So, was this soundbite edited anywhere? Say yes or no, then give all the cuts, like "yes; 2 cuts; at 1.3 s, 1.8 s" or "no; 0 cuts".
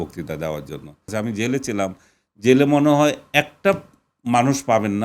yes; 1 cut; at 1.1 s